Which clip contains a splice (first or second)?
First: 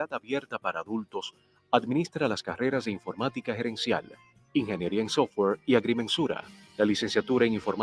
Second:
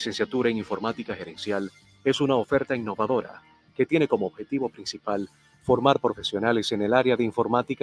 first